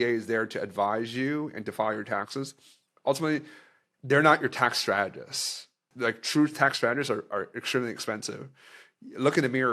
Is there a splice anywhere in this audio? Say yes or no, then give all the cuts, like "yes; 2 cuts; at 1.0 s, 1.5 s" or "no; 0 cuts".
no; 0 cuts